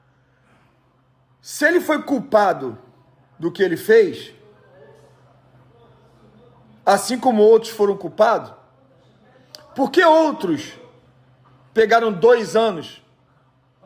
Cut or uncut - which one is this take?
uncut